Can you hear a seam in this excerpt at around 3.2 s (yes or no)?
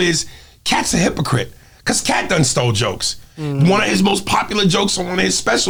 no